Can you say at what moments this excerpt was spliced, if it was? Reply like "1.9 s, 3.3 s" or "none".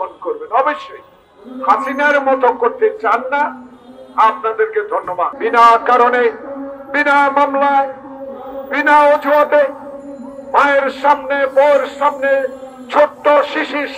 5.3 s

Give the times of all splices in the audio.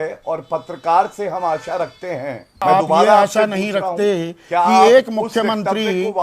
2.6 s

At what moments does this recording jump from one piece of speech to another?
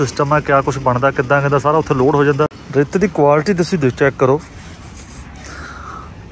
2.6 s

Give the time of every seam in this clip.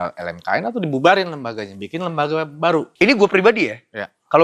2.9 s

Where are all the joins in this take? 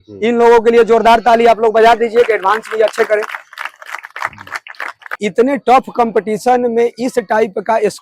5.2 s

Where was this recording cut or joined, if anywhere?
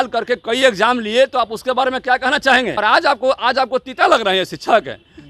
2.7 s

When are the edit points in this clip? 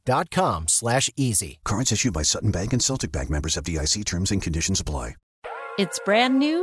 5.3 s

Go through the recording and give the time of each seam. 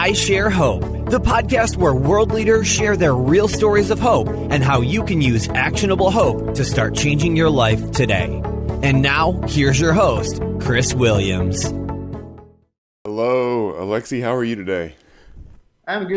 none

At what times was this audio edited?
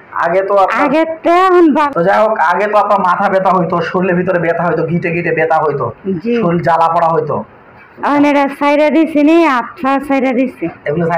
1.9 s

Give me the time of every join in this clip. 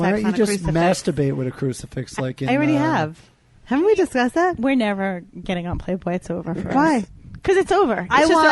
none

